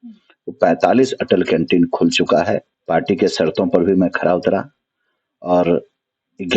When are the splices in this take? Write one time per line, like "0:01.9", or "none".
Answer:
0:02.7

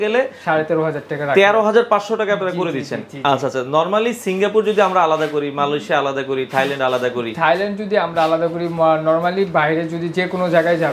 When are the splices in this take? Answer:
none

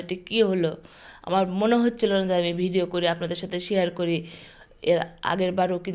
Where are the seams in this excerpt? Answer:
none

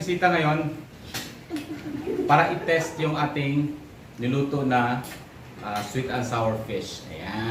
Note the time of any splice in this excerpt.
none

